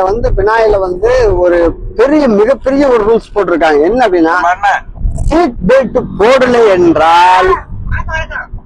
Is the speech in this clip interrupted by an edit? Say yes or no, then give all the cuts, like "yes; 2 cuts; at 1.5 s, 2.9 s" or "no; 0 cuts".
no; 0 cuts